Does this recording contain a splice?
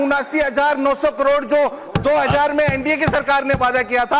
no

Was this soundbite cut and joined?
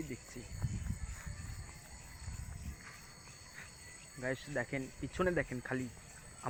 no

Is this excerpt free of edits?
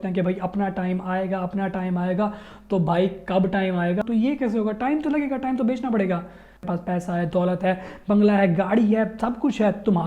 no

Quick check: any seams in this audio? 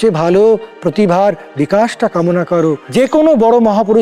yes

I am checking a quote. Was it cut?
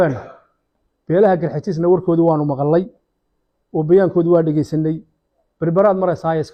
no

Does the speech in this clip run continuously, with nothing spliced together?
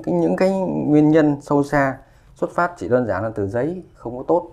yes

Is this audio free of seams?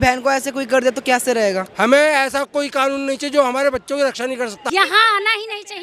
no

